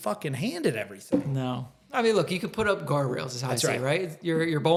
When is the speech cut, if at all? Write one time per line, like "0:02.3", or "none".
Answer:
none